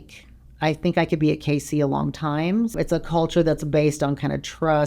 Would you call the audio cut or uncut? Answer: cut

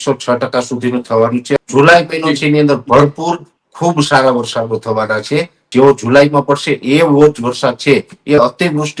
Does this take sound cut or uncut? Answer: cut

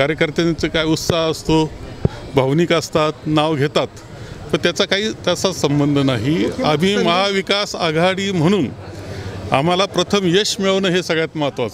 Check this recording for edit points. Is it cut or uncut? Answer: uncut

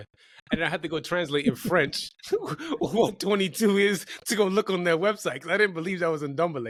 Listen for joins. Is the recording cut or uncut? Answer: uncut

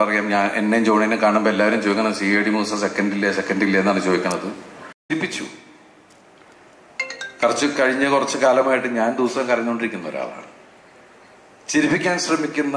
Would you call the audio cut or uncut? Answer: cut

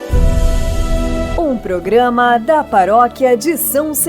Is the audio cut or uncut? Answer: cut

